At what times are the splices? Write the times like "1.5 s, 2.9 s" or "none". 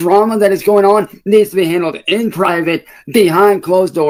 none

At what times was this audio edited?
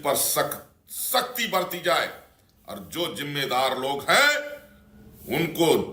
none

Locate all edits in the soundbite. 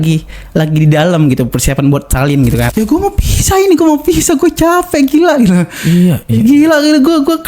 2.7 s

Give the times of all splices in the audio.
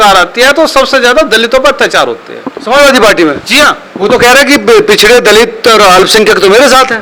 none

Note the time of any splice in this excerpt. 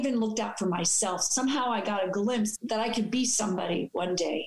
2.5 s

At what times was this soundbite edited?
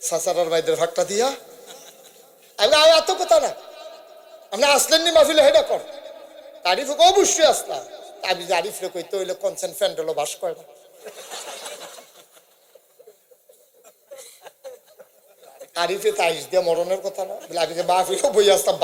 none

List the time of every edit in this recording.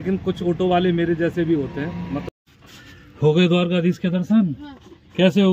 2.2 s

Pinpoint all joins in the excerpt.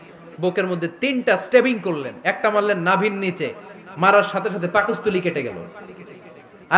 none

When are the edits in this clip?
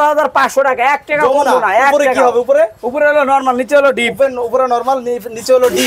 none

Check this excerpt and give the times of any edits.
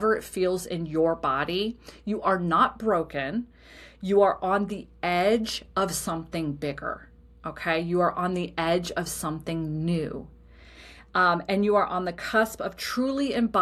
none

